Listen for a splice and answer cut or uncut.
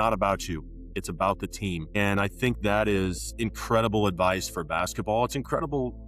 cut